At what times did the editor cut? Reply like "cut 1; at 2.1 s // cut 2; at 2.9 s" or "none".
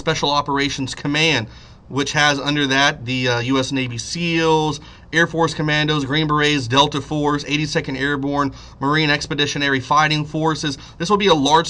cut 1; at 5.2 s